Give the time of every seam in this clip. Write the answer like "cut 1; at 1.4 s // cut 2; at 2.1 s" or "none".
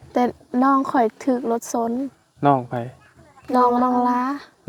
none